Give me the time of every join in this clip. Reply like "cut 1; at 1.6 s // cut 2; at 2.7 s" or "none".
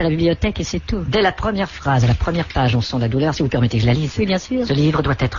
cut 1; at 1.4 s